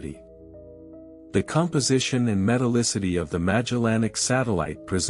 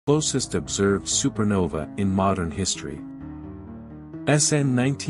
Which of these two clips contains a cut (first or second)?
first